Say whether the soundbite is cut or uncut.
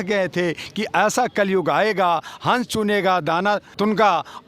uncut